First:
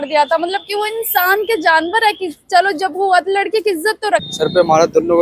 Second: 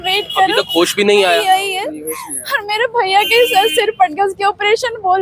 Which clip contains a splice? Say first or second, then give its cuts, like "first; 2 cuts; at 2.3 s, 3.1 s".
first; 1 cut; at 4.3 s